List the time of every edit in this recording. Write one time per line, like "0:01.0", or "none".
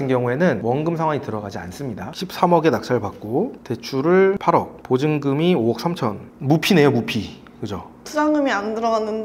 0:02.1